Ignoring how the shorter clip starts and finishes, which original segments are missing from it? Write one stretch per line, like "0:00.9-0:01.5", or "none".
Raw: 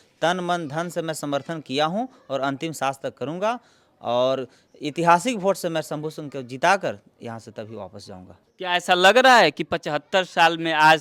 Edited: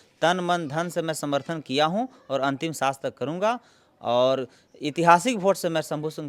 none